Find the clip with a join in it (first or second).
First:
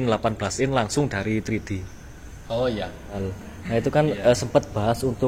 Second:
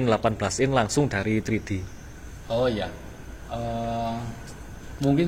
first